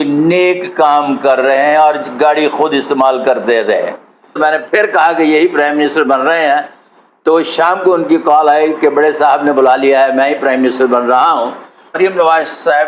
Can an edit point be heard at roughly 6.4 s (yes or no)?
no